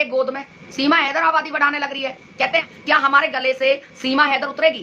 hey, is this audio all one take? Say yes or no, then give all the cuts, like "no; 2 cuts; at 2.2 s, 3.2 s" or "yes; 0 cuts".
no; 1 cut; at 2.7 s